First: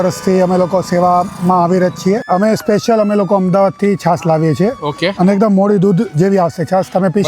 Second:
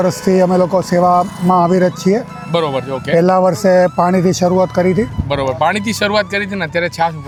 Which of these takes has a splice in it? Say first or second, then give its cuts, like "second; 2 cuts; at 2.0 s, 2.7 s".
first; 1 cut; at 2.2 s